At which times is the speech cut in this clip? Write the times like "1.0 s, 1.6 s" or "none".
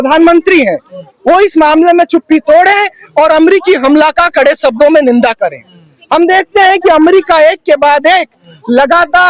none